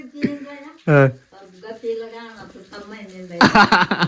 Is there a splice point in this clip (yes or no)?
no